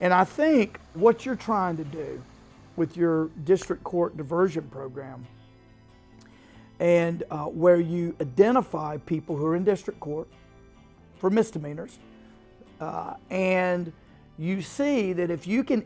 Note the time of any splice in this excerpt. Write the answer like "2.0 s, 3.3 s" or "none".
1.0 s